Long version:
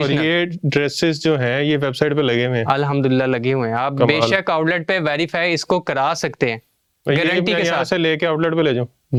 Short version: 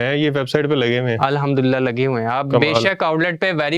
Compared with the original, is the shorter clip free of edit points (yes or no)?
yes